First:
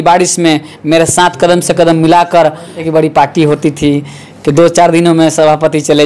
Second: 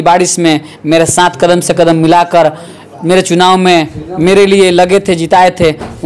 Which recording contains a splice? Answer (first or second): first